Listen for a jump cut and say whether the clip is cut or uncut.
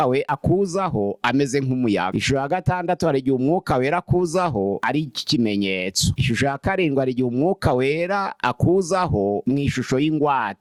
uncut